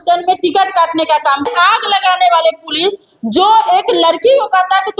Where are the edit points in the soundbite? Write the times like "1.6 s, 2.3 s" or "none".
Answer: 1.5 s